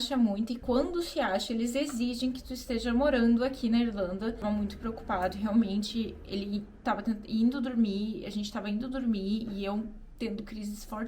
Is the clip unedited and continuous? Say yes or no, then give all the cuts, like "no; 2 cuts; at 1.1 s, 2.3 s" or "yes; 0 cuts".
no; 1 cut; at 4.4 s